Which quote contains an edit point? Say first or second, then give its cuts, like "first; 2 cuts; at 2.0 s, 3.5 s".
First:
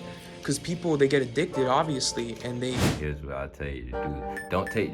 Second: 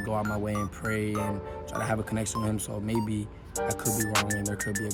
first; 1 cut; at 2.9 s